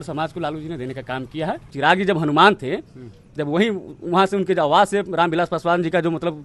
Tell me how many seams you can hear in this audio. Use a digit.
1